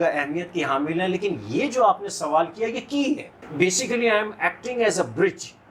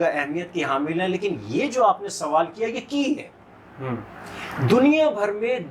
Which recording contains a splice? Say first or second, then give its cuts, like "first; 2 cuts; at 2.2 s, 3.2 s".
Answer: first; 1 cut; at 3.5 s